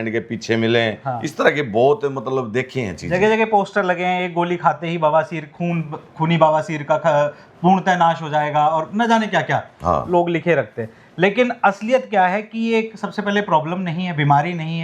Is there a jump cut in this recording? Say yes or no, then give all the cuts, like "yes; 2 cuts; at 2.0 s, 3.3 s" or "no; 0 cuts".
no; 0 cuts